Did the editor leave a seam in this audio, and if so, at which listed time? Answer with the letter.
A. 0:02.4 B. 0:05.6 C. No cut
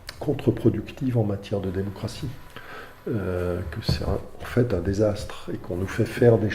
A